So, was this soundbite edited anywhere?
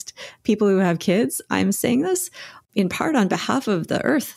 no; 0 cuts

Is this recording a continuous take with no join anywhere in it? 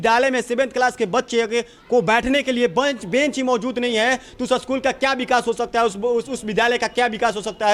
yes; 0 cuts

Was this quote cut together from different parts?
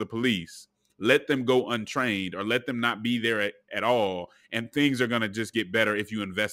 no; 0 cuts

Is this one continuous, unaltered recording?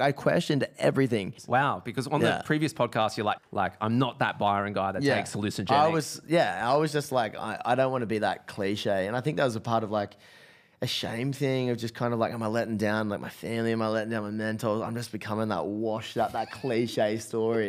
no; 2 cuts; at 1.4 s, 3.4 s

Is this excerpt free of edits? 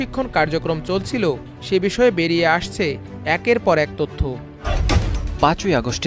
no; 1 cut; at 4.7 s

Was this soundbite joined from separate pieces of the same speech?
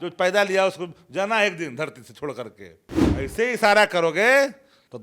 yes; 1 cut; at 3.1 s

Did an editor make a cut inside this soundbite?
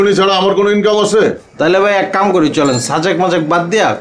yes; 1 cut; at 1.5 s

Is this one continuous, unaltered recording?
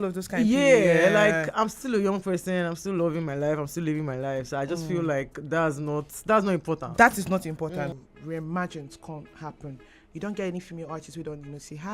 no; 1 cut; at 7.9 s

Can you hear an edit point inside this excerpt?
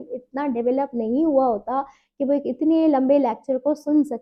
no; 0 cuts

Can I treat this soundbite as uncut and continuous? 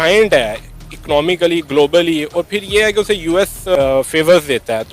no; 1 cut; at 3.8 s

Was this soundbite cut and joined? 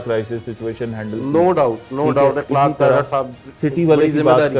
no; 0 cuts

